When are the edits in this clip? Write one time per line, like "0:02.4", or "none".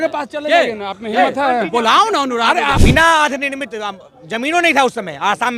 0:02.8